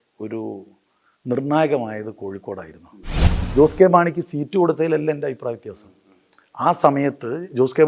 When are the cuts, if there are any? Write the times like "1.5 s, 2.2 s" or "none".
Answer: 3.3 s

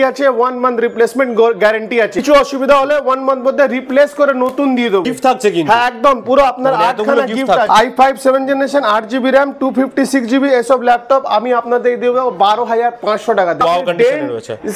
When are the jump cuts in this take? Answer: 2.2 s, 5.0 s, 7.7 s, 13.6 s

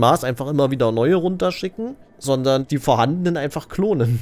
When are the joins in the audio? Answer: 2.1 s, 2.7 s

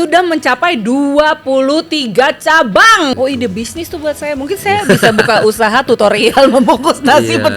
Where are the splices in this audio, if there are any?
3.1 s

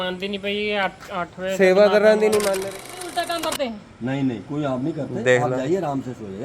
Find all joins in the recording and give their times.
2.6 s

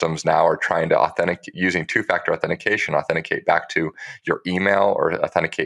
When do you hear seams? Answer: none

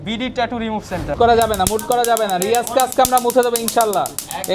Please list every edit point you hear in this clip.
1.2 s

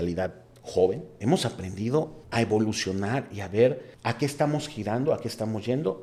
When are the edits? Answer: 1.1 s, 2.2 s, 3.9 s

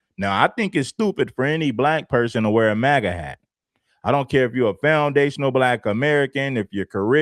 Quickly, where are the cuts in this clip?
2.7 s

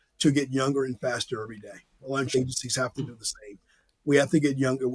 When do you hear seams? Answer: 2.3 s

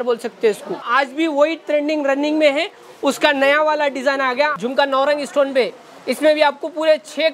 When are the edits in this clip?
0.8 s, 4.5 s

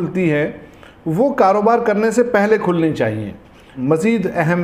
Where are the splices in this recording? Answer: 3.7 s

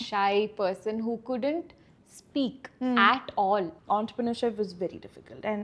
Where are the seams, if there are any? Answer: 3.8 s

